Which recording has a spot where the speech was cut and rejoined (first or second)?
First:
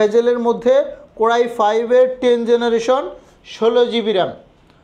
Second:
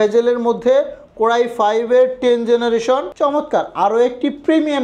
second